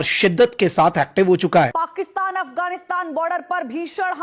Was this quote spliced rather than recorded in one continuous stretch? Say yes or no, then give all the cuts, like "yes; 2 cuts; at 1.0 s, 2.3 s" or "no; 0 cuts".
yes; 1 cut; at 1.7 s